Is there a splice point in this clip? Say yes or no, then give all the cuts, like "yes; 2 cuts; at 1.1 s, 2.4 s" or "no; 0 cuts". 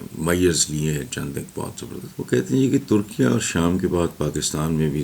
yes; 1 cut; at 2.1 s